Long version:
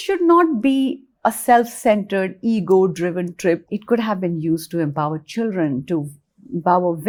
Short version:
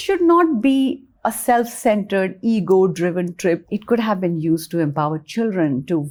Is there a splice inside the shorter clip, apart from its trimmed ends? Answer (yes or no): no